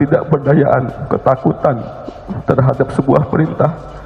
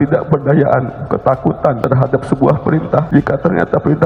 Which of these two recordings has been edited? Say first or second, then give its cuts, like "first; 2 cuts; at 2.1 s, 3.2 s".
second; 2 cuts; at 1.8 s, 3.1 s